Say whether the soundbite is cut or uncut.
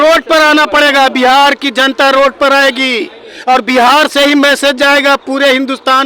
uncut